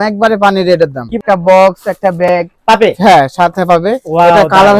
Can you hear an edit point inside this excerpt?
yes; 1 cut; at 1.1 s

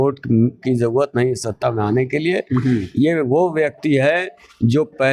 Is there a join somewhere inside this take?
no; 0 cuts

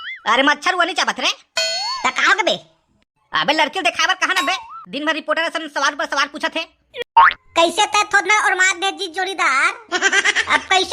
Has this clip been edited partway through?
yes; 1 cut; at 7.0 s

